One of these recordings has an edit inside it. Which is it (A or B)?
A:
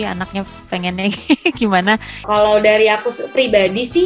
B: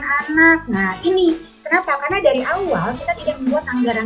A